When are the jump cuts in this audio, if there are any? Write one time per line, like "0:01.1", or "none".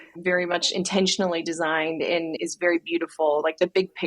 0:02.4